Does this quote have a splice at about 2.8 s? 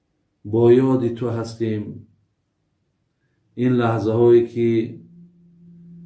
no; 0 cuts

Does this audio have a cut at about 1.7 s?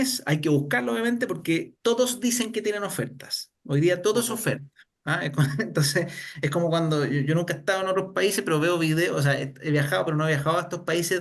yes; 1 cut; at 1.7 s

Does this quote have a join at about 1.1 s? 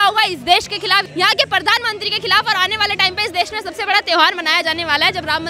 yes; 1 cut; at 1.1 s

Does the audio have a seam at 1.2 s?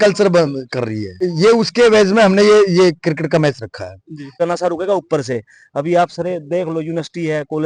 yes; 2 cuts; at 1.2 s, 4.4 s

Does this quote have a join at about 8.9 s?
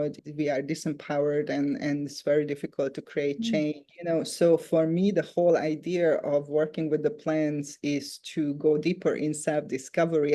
no; 0 cuts

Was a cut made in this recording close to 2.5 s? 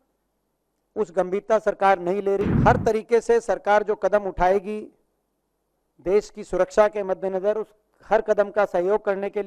yes; 1 cut; at 2.5 s

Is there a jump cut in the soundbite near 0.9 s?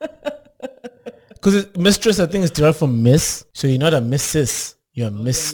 no; 1 cut; at 3.4 s

